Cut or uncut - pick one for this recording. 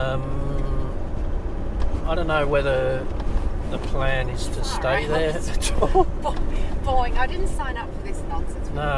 uncut